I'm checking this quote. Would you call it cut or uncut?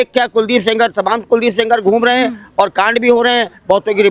uncut